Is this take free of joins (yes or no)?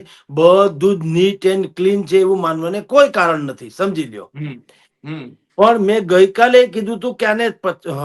yes